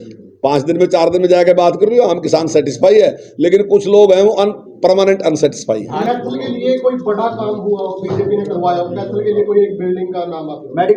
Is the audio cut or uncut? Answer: cut